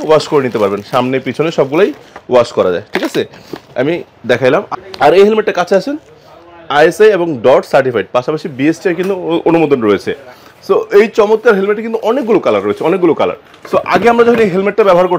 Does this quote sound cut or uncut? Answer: uncut